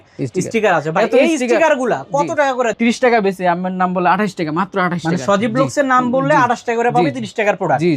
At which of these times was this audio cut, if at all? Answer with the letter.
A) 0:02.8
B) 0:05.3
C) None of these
A